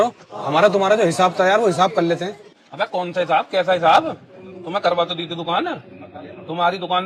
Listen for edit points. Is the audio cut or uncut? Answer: uncut